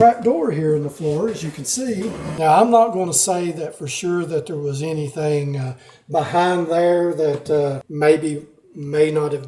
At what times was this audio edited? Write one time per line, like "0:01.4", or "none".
0:02.3
0:07.8